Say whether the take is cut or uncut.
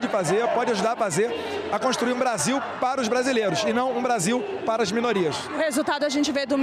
uncut